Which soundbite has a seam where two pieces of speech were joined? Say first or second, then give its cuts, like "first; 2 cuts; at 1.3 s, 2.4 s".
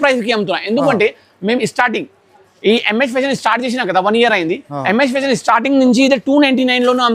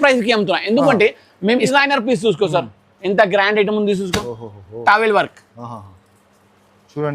second; 1 cut; at 1.7 s